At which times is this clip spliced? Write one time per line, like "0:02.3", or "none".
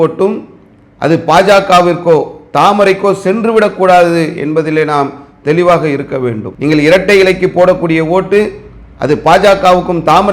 0:06.5